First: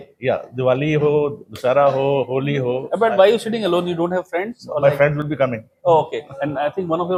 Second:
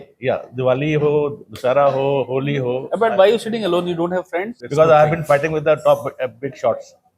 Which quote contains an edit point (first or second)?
second